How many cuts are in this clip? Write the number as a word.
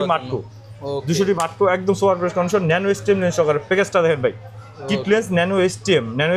zero